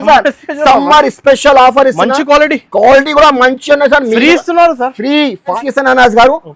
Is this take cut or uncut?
cut